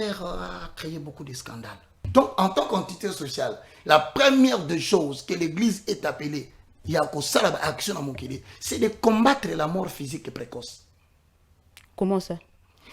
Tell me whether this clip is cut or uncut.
cut